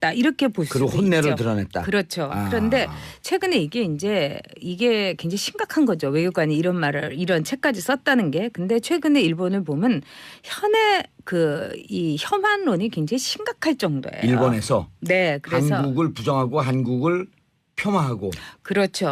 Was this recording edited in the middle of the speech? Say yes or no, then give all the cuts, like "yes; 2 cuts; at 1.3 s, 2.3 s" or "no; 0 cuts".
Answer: yes; 1 cut; at 7.9 s